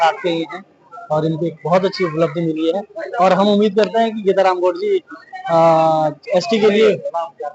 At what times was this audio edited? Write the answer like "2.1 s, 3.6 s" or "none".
none